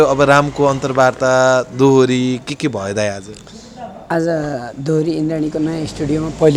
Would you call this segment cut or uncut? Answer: uncut